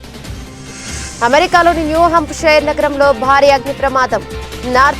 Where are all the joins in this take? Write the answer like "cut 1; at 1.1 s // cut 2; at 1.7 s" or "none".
cut 1; at 0.9 s